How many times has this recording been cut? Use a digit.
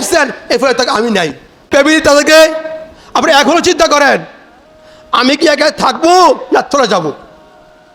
1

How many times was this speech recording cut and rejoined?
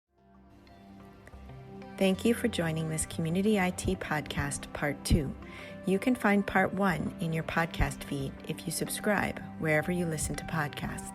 1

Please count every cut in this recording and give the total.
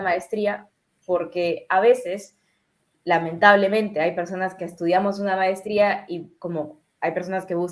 0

